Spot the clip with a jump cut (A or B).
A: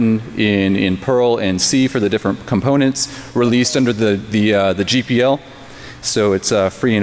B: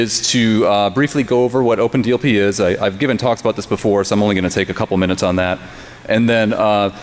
B